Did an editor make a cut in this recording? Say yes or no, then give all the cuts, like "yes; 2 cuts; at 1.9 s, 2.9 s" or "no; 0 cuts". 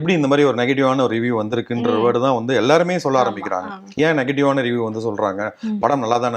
no; 0 cuts